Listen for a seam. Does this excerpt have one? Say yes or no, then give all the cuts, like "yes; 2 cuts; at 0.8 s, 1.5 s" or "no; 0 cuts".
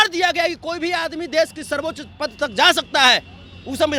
no; 0 cuts